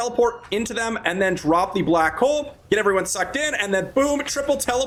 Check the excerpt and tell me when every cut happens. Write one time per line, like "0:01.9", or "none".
none